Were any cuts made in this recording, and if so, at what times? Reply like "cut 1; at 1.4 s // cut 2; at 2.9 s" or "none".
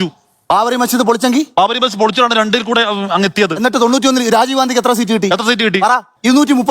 cut 1; at 3.6 s